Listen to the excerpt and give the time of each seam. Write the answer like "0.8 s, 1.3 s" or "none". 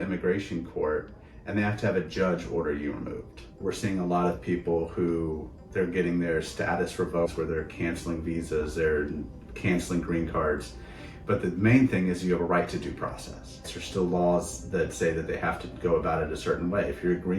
3.5 s, 7.3 s, 13.8 s